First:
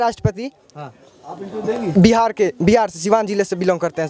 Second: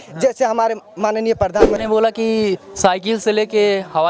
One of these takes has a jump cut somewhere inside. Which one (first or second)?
second